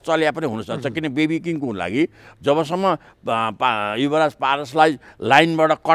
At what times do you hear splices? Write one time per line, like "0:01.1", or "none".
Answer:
none